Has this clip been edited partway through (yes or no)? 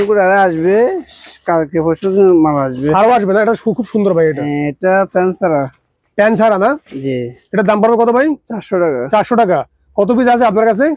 no